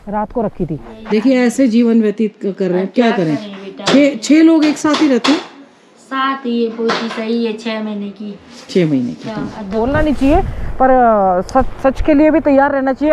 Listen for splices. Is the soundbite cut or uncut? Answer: cut